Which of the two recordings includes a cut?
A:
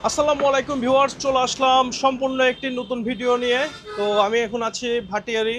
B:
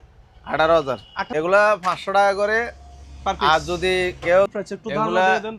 B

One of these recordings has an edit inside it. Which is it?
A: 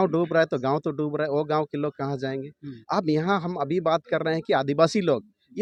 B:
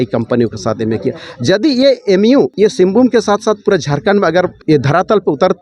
B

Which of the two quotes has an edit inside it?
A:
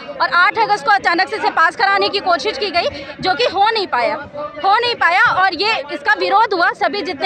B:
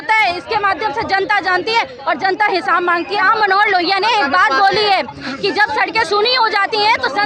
B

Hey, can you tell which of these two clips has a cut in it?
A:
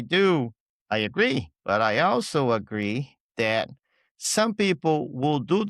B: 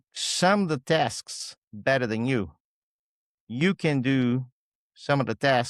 A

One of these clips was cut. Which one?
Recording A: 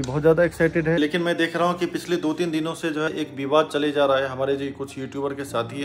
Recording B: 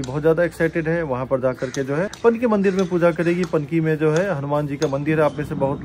A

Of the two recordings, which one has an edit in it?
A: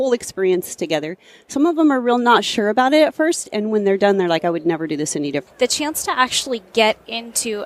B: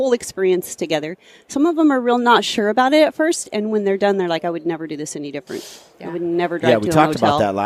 A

